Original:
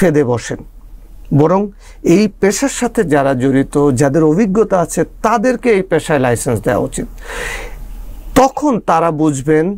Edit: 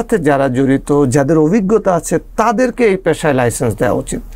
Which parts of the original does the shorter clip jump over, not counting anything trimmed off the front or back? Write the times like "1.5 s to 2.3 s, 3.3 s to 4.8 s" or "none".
none